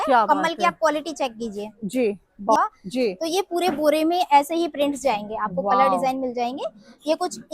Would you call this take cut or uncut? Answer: cut